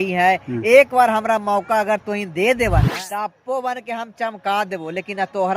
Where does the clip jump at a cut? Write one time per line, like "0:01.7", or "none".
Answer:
0:02.9